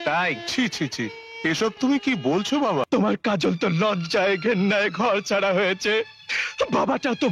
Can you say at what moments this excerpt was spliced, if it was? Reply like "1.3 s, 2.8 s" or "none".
2.9 s